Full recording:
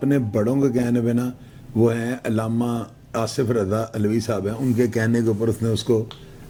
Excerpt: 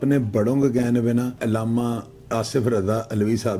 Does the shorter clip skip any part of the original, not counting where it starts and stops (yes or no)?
yes